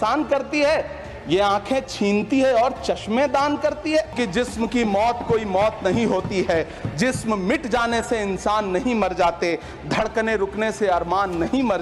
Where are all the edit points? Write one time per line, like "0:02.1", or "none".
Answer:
0:04.1